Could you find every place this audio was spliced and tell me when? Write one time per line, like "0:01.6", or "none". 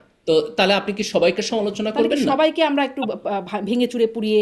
none